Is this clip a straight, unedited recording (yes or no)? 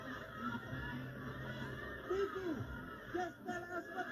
yes